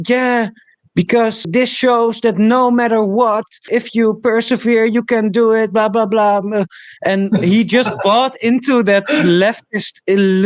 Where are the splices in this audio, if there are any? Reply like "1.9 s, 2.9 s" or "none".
1.5 s, 3.7 s